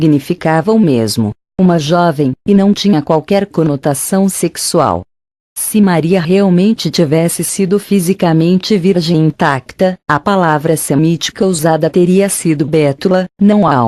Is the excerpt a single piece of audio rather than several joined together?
no; 1 cut; at 11.9 s

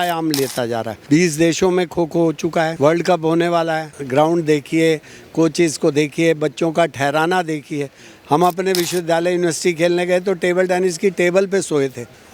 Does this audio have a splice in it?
yes; 3 cuts; at 0.9 s, 2.7 s, 3.9 s

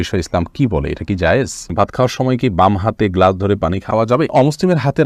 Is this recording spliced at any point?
yes; 2 cuts; at 1.7 s, 4.1 s

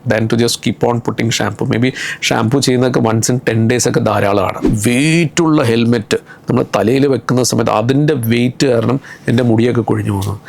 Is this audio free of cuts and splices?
no; 1 cut; at 4.7 s

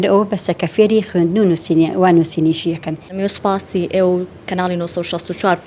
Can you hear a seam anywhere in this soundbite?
yes; 1 cut; at 3.1 s

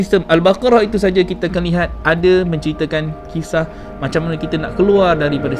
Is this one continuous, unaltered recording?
yes; 0 cuts

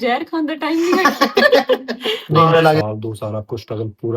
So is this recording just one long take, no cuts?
no; 1 cut; at 2.8 s

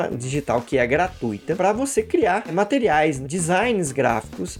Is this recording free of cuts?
yes; 0 cuts

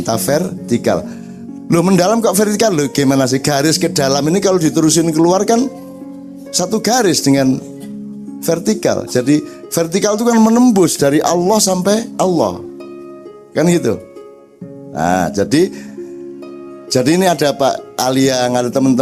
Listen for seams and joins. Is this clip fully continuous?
yes; 0 cuts

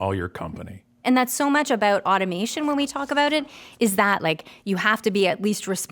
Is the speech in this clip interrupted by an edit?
yes; 1 cut; at 1.0 s

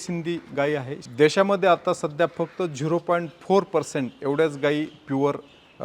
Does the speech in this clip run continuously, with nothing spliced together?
no; 1 cut; at 1.0 s

